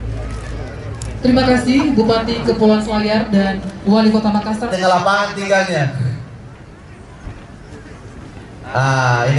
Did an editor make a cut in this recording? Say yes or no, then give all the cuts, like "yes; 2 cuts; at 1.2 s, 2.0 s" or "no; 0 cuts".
yes; 1 cut; at 4.7 s